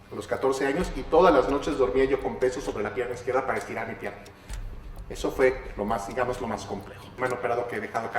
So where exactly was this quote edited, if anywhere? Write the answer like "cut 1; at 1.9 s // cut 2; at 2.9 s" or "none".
cut 1; at 7.2 s